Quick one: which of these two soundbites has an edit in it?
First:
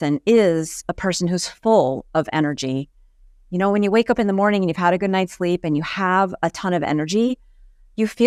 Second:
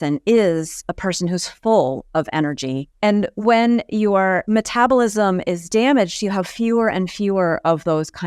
second; 2 cuts; at 2.9 s, 4.4 s

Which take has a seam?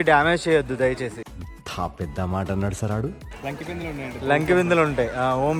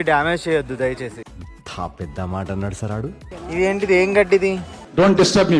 second; 1 cut; at 3.3 s

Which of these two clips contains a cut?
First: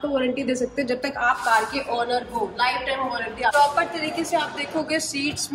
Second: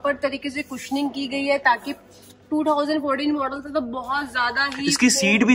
first; 1 cut; at 3.5 s

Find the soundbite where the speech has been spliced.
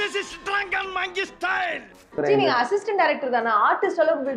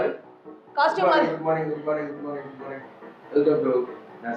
first; 1 cut; at 2.0 s

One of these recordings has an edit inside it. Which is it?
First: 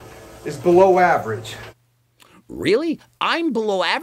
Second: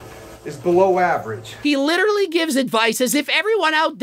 second; 1 cut; at 1.5 s

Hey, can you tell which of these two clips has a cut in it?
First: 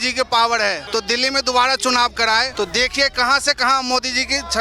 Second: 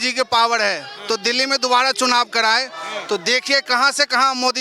first; 2 cuts; at 0.8 s, 2.5 s

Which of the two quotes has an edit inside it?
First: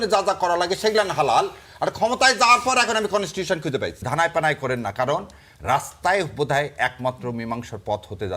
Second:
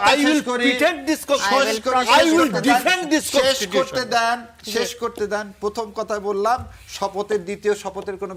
first; 1 cut; at 4.0 s

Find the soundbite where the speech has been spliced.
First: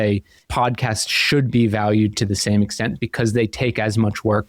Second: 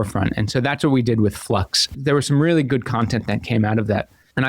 second; 1 cut; at 2.0 s

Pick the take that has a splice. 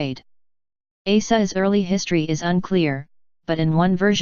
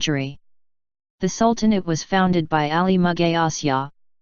first; 1 cut; at 1.5 s

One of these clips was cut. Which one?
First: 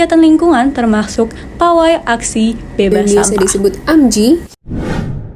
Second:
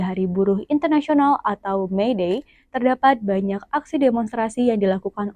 first; 2 cuts; at 2.9 s, 4.5 s

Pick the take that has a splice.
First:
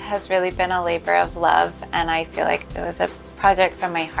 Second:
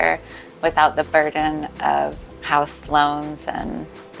first; 1 cut; at 2.6 s

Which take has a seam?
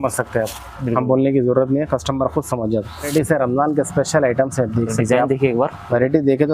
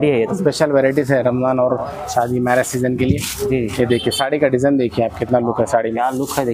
first; 1 cut; at 3.1 s

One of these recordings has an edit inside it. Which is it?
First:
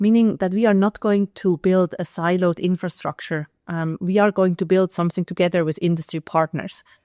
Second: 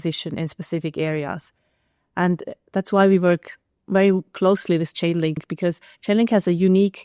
second; 1 cut; at 5.4 s

